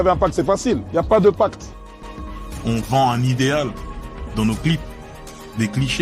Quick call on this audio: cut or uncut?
cut